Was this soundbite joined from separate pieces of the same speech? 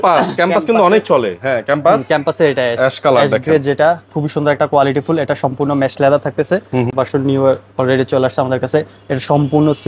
yes; 1 cut; at 6.9 s

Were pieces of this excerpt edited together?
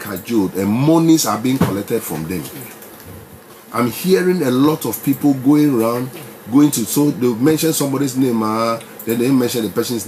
no; 0 cuts

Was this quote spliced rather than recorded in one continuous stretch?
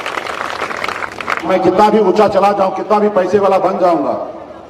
yes; 1 cut; at 1.5 s

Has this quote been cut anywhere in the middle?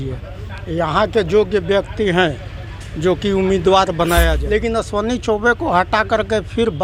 yes; 1 cut; at 4.4 s

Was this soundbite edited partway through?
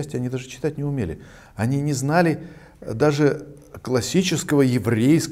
no; 0 cuts

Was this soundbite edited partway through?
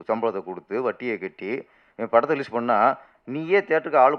no; 0 cuts

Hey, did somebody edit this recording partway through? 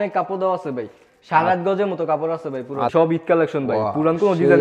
yes; 1 cut; at 2.9 s

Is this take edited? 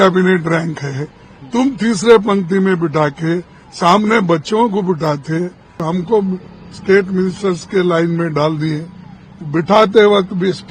yes; 1 cut; at 5.8 s

